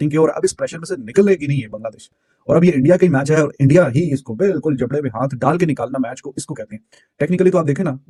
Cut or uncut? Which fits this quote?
uncut